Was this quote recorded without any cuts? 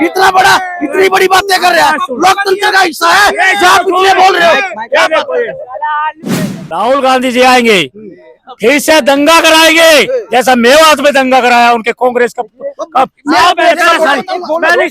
no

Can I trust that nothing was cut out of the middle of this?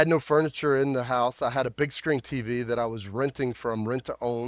yes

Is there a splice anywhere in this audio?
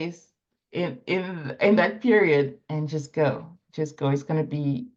no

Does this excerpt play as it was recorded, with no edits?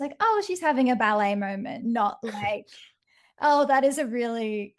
yes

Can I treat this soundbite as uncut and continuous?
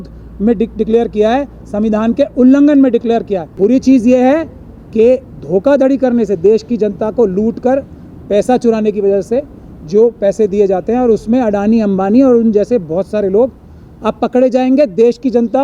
no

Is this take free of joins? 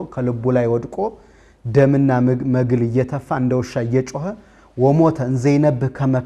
yes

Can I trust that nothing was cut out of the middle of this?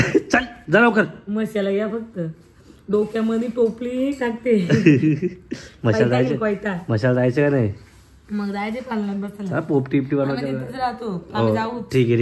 yes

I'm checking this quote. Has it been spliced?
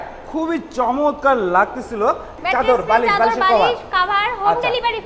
yes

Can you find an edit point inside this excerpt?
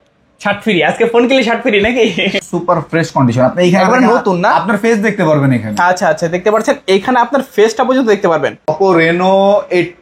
yes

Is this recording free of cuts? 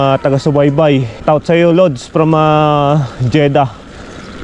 no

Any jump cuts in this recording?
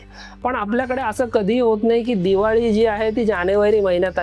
no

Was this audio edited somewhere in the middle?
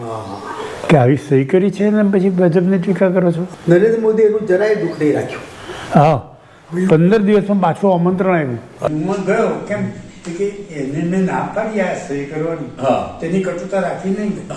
yes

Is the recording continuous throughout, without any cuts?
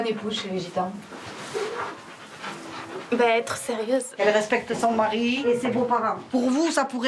yes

